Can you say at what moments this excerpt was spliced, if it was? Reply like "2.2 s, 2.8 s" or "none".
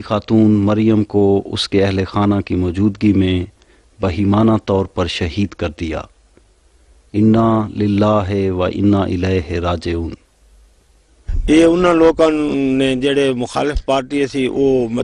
none